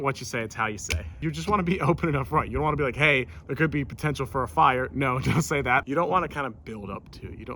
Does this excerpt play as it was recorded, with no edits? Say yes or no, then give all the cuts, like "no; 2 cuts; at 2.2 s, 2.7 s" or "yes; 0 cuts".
no; 1 cut; at 1.2 s